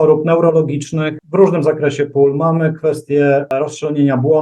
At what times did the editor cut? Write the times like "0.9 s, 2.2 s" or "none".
1.2 s, 3.5 s